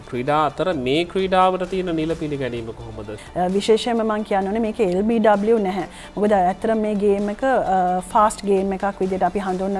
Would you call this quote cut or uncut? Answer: cut